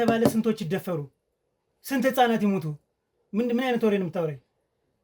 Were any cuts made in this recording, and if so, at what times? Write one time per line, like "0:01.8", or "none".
none